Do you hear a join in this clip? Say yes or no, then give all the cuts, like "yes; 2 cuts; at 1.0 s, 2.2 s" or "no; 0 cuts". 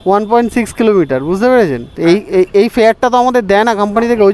yes; 1 cut; at 1.9 s